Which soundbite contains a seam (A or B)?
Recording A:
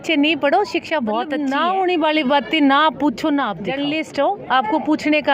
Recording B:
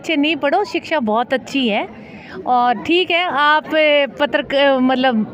A